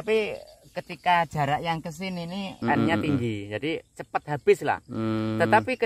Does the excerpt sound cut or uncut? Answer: cut